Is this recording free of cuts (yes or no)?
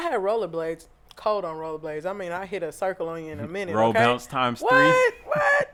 yes